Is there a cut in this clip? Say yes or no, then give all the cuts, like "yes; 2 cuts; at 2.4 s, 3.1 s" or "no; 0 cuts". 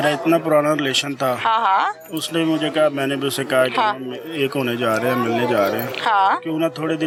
no; 0 cuts